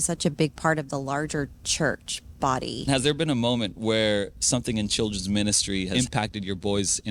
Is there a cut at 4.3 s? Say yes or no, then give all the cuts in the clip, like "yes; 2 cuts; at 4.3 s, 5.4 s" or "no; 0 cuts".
no; 2 cuts; at 2.8 s, 5.9 s